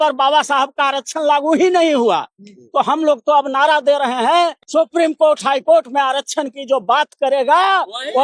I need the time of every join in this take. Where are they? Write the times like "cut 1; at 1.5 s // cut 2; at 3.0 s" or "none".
cut 1; at 4.6 s